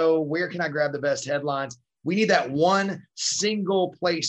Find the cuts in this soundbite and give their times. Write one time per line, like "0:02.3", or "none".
0:01.9